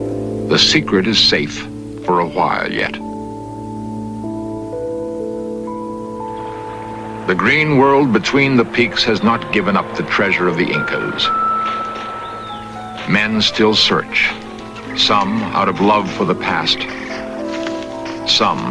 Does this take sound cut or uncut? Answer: cut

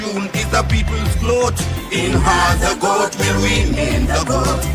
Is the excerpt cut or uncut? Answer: uncut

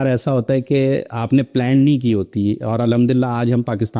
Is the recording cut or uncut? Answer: uncut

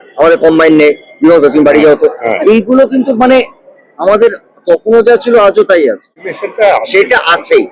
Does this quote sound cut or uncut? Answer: cut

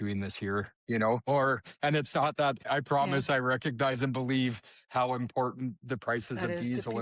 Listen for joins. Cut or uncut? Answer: cut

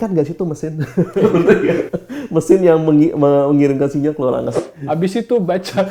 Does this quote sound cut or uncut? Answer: cut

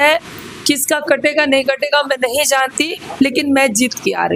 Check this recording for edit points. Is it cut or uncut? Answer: uncut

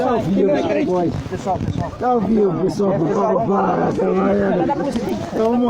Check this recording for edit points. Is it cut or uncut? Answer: uncut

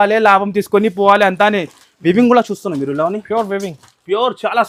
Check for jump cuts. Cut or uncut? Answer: uncut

